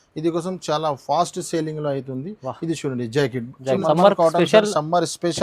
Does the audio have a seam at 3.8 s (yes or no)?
yes